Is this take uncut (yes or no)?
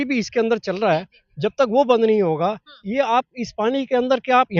yes